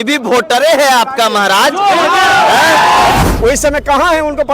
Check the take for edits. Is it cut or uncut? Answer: cut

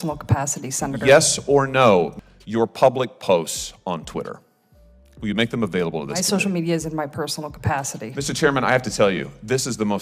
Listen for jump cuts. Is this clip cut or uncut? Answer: cut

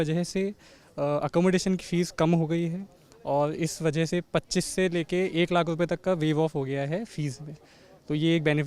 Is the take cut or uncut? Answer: uncut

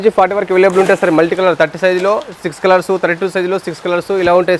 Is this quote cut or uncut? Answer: uncut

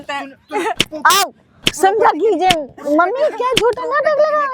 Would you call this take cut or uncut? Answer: uncut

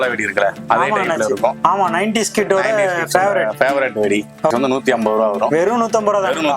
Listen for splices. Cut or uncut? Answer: cut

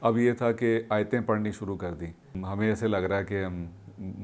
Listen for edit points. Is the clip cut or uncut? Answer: cut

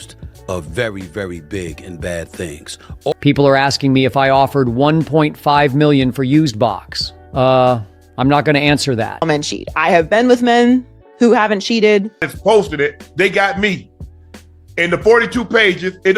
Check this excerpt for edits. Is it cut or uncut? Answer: cut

